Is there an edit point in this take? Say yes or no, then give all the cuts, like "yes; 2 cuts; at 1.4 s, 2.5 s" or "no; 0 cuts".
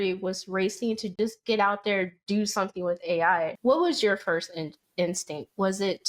yes; 2 cuts; at 1.2 s, 3.6 s